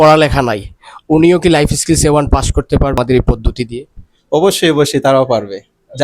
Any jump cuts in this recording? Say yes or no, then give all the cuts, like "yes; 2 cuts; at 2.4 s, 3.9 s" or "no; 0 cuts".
yes; 1 cut; at 3.0 s